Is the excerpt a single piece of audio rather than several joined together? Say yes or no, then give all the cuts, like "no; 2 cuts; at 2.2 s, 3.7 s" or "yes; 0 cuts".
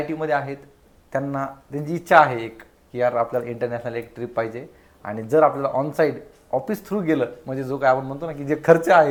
yes; 0 cuts